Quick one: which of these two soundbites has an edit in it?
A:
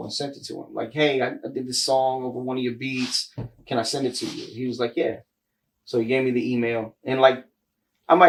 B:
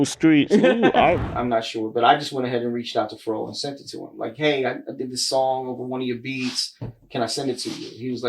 B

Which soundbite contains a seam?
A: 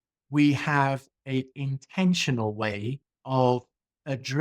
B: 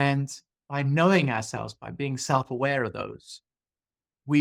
A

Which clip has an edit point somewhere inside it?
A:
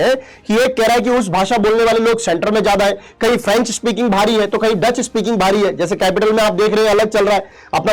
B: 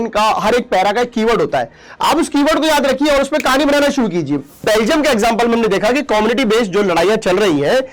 B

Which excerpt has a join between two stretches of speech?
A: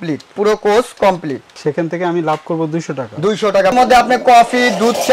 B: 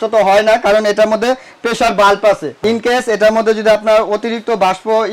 A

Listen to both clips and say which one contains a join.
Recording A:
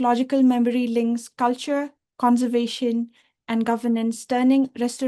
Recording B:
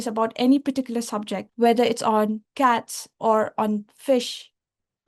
B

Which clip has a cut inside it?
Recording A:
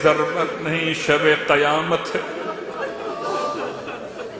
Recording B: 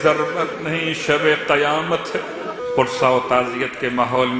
B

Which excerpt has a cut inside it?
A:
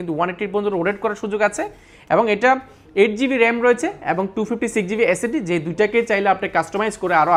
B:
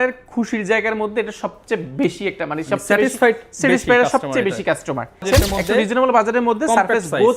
B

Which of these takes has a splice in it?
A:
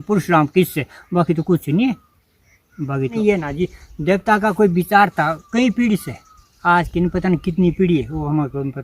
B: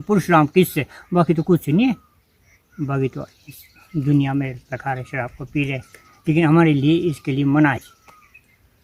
A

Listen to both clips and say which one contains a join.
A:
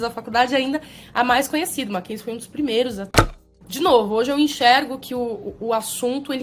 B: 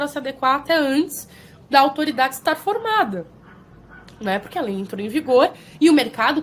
A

